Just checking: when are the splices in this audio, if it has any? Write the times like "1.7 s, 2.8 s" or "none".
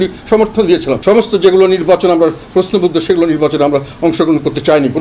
1.0 s